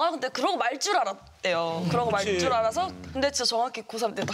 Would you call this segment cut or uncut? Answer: uncut